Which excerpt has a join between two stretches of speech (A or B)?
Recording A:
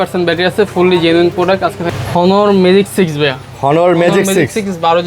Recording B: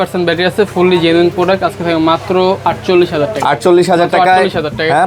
A